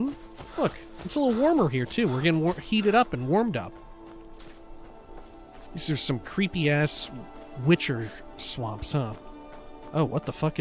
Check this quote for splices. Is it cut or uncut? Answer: cut